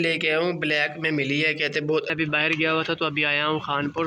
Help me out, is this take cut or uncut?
cut